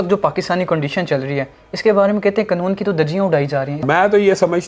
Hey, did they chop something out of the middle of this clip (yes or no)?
yes